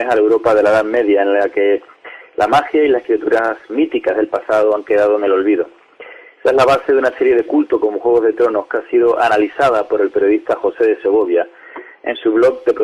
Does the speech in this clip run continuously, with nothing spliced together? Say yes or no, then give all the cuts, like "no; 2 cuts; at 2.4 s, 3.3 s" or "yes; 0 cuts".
yes; 0 cuts